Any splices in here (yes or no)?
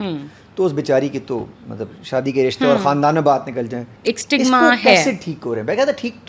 yes